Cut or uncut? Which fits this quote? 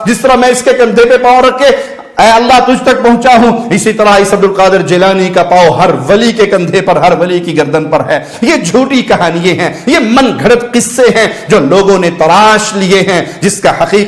uncut